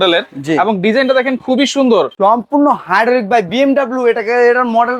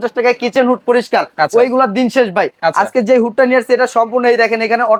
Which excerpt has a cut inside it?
first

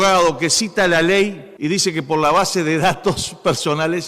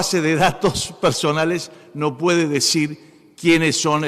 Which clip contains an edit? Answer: first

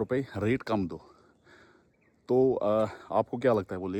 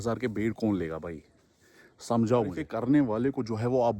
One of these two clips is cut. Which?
second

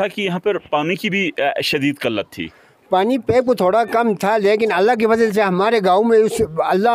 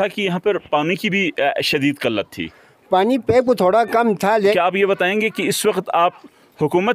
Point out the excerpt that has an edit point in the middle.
second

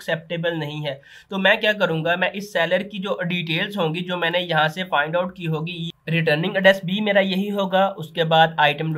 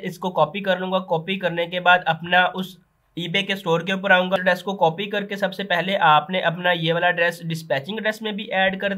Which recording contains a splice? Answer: second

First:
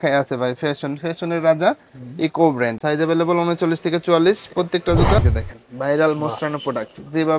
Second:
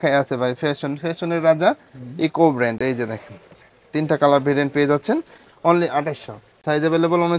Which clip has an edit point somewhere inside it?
first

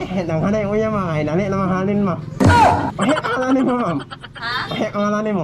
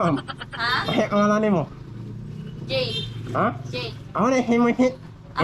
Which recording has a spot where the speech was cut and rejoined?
first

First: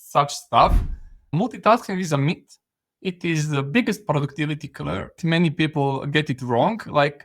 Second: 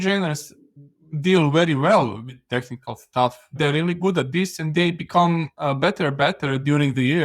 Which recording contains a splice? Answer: first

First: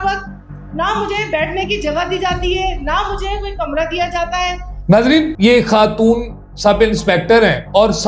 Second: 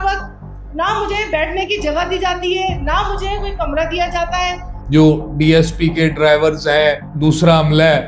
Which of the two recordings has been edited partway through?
second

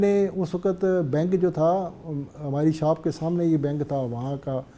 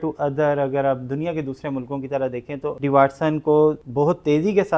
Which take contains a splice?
second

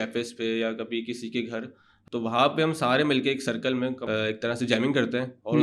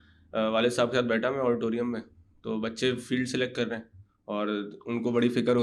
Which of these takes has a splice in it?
first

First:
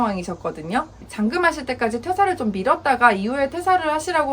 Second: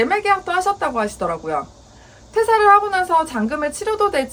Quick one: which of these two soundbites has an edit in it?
first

